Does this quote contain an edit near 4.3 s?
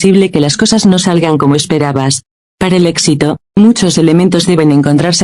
no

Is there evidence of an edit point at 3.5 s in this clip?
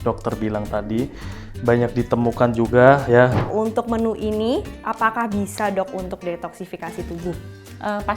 yes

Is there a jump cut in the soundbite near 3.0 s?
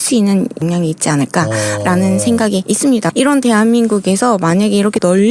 yes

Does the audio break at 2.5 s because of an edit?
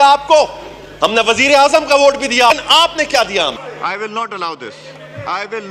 yes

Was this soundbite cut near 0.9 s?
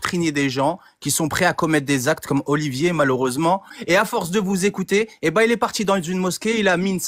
no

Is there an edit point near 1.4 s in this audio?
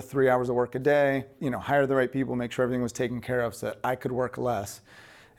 yes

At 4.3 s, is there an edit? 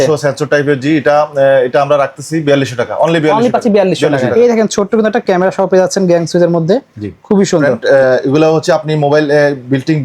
yes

